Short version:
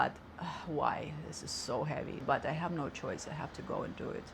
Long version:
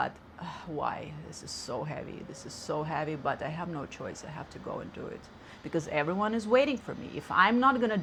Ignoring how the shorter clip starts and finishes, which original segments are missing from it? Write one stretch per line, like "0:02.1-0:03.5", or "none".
0:02.2-0:03.2

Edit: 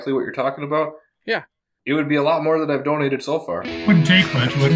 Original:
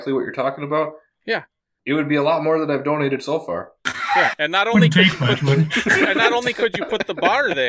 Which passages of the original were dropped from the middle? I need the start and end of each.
0:03.8-0:04.7

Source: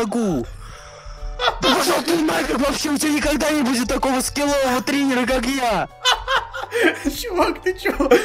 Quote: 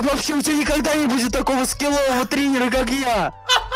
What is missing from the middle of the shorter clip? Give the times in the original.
none

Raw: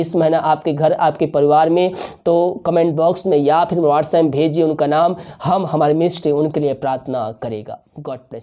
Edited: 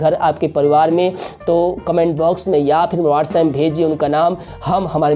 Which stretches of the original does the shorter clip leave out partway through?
none

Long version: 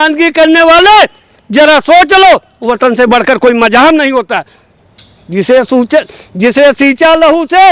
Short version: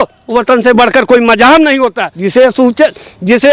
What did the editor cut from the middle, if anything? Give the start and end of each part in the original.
0:04.4-0:05.2

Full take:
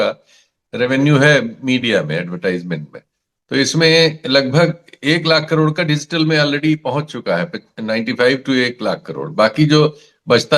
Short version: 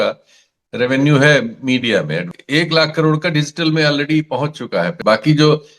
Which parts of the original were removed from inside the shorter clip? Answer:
0:02.3-0:04.9
0:07.5-0:09.3

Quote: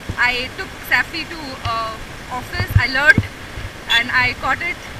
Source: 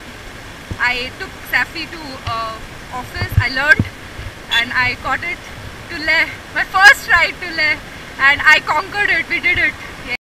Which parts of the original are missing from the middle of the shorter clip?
none

